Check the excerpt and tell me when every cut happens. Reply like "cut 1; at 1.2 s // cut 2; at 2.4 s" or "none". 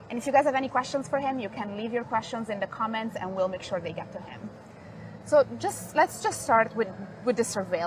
cut 1; at 1.1 s